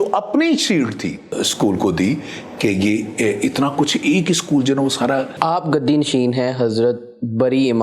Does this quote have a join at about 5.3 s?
yes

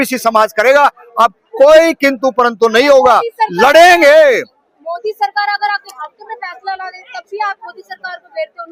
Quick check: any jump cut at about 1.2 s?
no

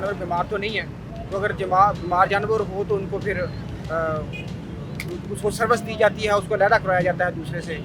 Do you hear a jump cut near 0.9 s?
no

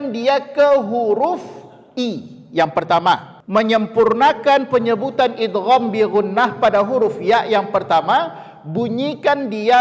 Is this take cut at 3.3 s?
yes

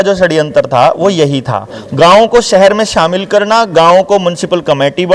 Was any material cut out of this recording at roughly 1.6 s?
no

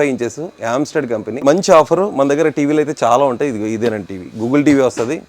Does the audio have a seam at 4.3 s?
no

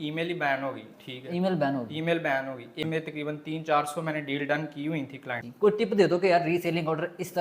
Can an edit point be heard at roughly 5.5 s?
yes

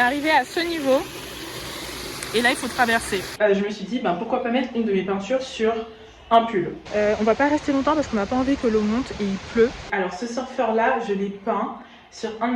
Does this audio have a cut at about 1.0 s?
no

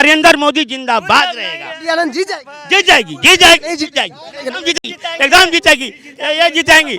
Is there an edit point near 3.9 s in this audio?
no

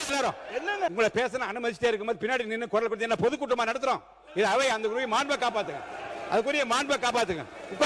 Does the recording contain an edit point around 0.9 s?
yes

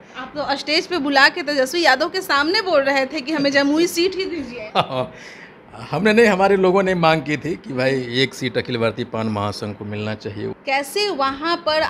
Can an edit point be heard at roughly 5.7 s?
no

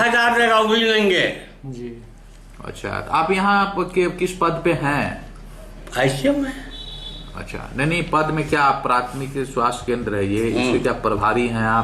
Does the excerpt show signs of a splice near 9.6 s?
no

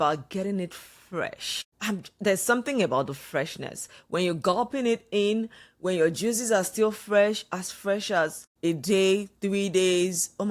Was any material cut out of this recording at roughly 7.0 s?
no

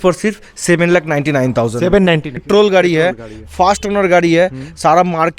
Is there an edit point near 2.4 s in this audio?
yes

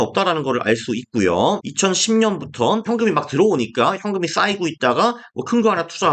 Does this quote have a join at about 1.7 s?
yes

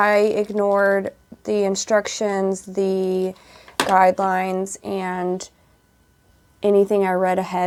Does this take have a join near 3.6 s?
no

